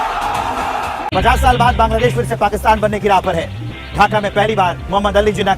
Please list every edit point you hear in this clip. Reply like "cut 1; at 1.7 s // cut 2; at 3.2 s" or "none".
cut 1; at 1.0 s